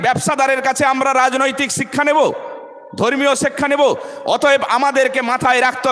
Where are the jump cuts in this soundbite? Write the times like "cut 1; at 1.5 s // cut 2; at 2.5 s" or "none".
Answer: none